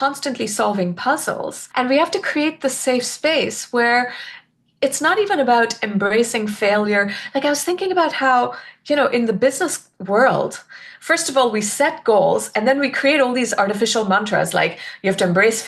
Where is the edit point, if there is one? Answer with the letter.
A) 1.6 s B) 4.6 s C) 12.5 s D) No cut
A